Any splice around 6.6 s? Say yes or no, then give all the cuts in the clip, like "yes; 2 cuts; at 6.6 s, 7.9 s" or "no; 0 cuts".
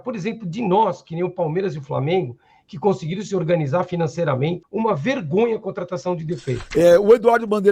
yes; 2 cuts; at 4.6 s, 6.6 s